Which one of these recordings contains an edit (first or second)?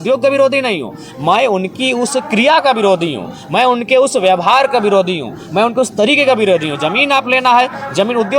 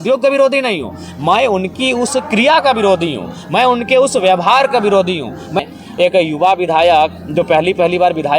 second